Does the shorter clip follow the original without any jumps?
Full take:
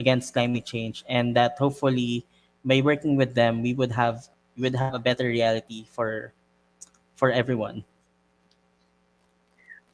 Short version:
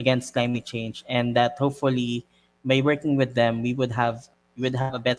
yes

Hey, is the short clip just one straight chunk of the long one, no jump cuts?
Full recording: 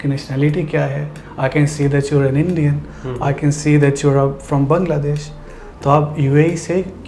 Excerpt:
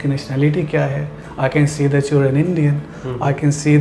yes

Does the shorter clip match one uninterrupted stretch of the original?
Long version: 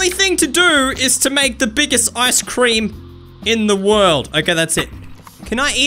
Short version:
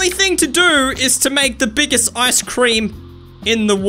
yes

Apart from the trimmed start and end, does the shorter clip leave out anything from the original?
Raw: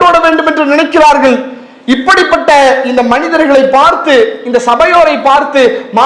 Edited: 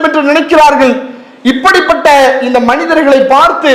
no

